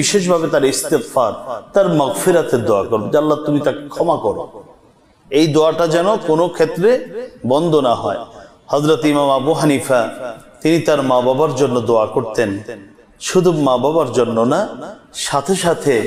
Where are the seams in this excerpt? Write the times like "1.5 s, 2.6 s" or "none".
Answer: none